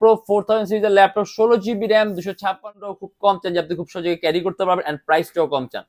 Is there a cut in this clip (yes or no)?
yes